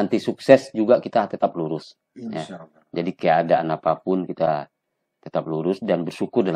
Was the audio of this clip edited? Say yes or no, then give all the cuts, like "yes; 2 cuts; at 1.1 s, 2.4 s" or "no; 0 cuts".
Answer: no; 0 cuts